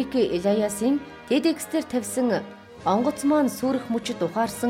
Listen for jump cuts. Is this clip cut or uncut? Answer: uncut